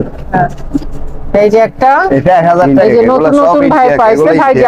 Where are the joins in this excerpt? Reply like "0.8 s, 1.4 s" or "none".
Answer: 2.7 s

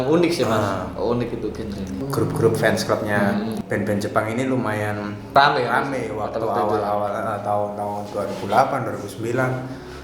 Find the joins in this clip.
2.0 s, 3.6 s, 5.3 s

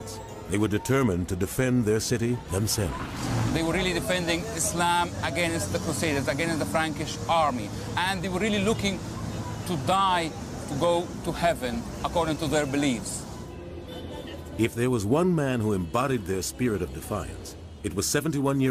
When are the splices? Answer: 17.7 s

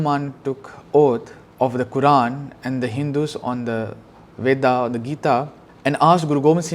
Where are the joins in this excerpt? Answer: 1.4 s, 5.6 s

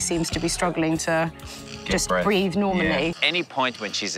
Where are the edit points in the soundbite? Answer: 3.2 s

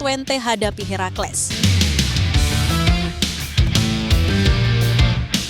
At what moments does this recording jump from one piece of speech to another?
1.4 s

